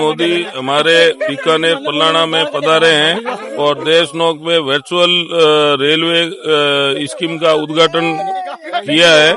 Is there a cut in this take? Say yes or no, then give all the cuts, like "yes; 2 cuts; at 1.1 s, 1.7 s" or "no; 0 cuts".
no; 0 cuts